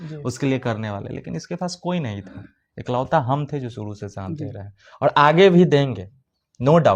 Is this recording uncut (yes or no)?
yes